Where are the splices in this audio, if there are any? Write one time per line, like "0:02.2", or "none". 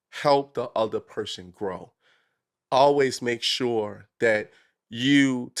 none